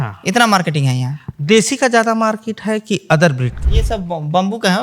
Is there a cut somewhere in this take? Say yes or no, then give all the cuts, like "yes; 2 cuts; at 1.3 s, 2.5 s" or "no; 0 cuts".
yes; 1 cut; at 3.7 s